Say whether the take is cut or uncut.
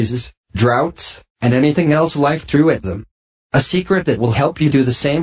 uncut